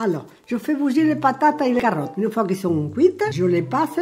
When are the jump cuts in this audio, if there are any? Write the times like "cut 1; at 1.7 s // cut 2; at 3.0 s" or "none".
none